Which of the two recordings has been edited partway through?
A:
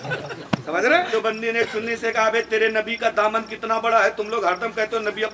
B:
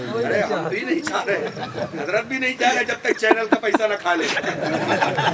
A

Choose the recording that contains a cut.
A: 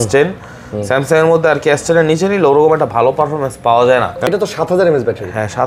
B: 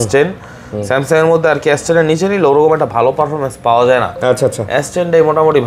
A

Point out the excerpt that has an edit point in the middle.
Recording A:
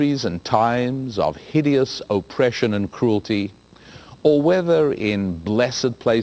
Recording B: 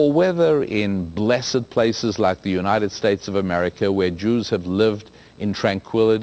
B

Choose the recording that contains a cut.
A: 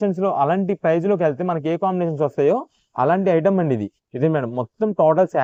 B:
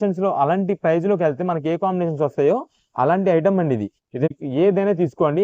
B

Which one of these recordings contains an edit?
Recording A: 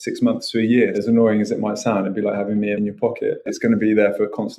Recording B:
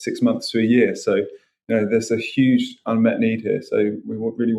A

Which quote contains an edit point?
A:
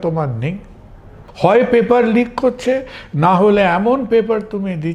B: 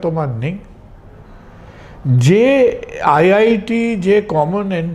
A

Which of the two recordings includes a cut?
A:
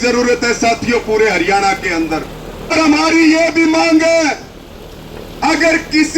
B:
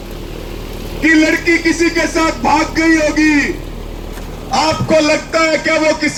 A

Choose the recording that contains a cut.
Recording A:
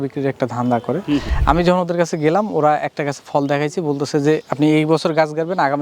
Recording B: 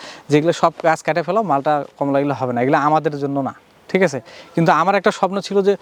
A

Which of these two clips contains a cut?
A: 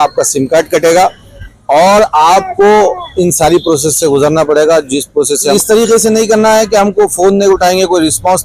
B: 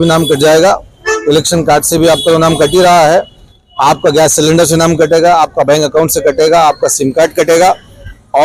A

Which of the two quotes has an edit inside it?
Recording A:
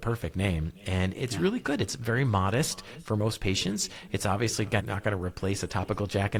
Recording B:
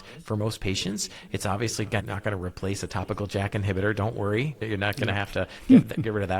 B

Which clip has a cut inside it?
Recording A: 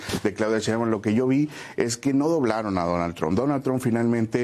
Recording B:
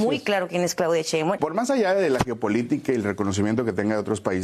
B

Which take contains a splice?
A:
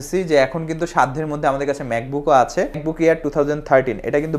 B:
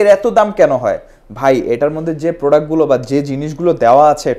A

